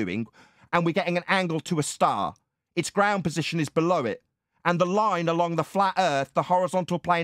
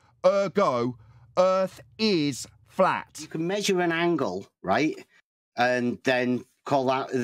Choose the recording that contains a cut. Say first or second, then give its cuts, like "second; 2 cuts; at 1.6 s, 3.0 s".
second; 1 cut; at 3.4 s